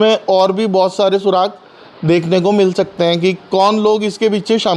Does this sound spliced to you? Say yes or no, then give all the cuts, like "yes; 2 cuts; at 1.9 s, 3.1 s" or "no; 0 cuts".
no; 0 cuts